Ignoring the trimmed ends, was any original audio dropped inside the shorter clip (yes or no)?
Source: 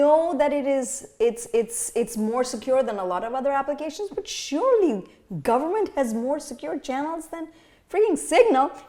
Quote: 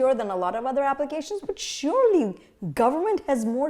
no